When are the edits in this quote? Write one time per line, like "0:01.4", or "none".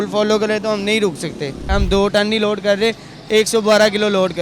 0:01.7